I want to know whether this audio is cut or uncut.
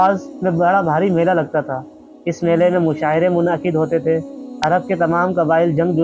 uncut